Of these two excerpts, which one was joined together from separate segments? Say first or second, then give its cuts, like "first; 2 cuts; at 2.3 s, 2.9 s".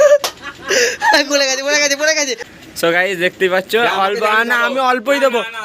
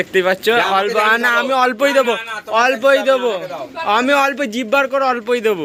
first; 1 cut; at 2.3 s